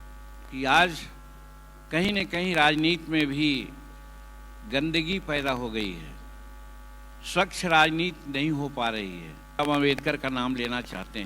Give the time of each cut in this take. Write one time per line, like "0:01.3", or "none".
0:09.6